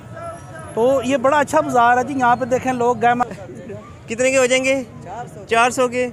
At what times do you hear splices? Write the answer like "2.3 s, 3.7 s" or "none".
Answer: 3.2 s